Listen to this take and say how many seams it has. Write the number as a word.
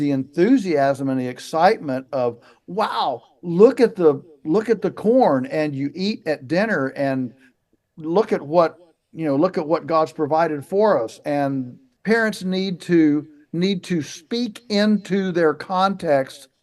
one